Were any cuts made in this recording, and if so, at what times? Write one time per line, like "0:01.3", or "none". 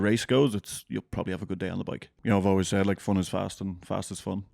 0:02.1